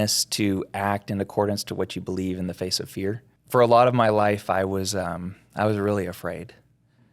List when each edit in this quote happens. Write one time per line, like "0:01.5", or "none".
0:03.3

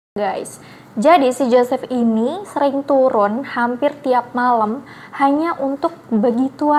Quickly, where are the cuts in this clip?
none

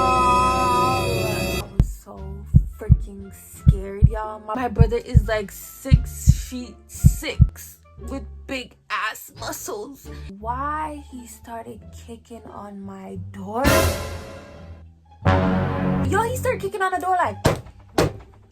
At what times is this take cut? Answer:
0:01.6
0:10.3
0:16.0

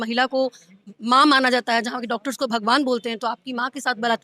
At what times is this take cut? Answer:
0:00.9

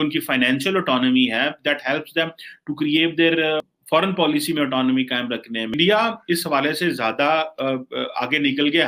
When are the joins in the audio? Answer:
0:03.6
0:05.8

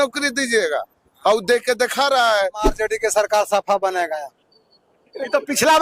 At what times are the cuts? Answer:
0:02.7

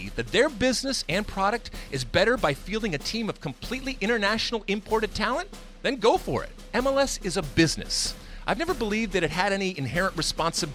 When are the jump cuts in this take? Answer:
0:06.6

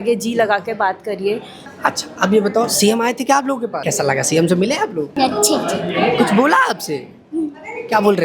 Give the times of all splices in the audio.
0:01.8
0:03.8
0:05.1

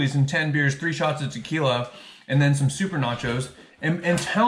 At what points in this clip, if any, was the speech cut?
none

